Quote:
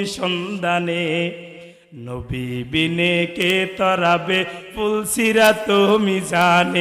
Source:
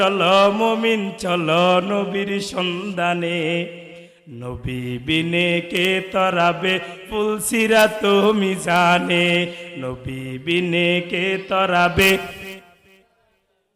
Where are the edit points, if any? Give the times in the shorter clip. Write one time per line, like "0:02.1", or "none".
none